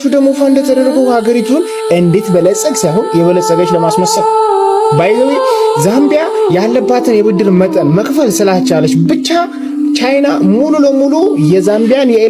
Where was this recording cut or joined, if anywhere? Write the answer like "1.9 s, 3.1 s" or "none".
none